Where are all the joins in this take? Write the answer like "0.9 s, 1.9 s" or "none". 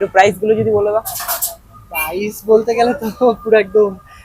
none